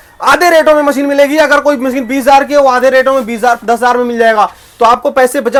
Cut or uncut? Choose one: uncut